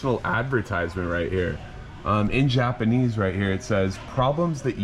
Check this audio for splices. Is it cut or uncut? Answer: uncut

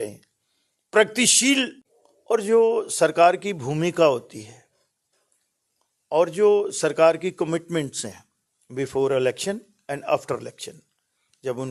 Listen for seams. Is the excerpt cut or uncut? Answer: cut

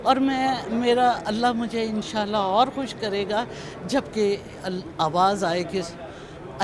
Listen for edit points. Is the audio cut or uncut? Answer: uncut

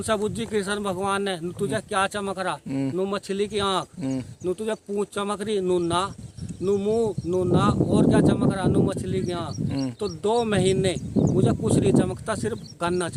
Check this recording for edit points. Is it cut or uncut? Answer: uncut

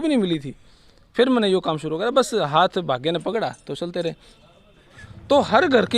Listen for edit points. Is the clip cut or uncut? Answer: cut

